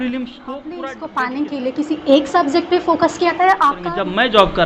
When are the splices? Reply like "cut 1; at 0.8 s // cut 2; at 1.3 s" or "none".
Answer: cut 1; at 1.0 s // cut 2; at 3.8 s